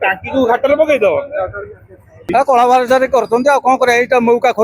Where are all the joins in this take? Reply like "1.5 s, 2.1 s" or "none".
2.3 s